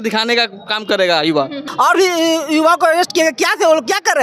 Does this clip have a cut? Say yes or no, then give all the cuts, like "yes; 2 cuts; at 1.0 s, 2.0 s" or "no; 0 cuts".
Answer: yes; 1 cut; at 1.6 s